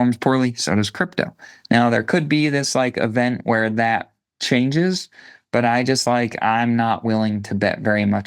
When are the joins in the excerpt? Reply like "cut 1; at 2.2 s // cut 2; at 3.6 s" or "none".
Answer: none